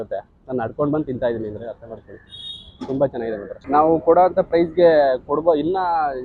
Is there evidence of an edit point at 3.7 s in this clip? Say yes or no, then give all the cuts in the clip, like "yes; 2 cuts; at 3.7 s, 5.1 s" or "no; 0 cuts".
yes; 1 cut; at 3.7 s